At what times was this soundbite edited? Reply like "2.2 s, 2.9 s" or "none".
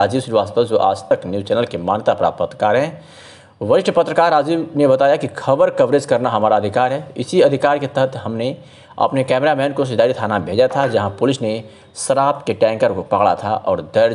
1.0 s